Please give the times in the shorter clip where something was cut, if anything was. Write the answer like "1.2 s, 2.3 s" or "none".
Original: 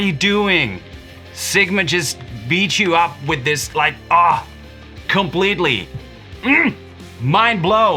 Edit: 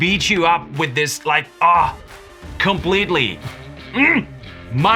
none